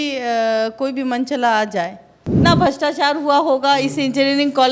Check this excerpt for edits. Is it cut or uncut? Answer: cut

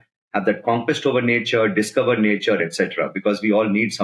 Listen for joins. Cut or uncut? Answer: uncut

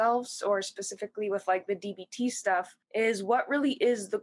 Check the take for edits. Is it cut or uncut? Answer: cut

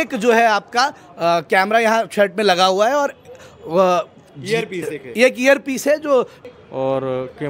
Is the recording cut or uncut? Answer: cut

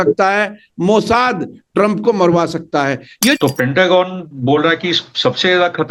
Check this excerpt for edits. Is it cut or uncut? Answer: cut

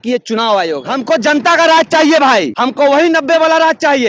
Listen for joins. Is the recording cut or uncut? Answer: cut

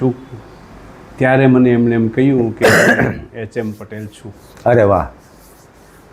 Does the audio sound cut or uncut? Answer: uncut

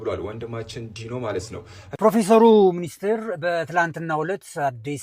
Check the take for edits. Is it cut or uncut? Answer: cut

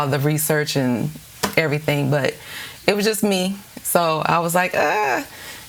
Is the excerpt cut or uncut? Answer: uncut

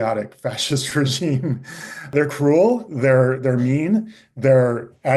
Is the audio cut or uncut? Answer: cut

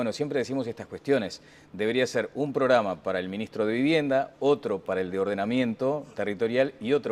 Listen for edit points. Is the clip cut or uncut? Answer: uncut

